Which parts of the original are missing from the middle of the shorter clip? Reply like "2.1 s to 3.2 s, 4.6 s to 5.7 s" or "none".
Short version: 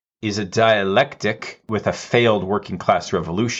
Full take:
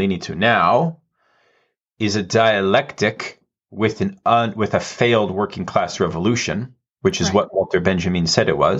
3.4 s to 4.5 s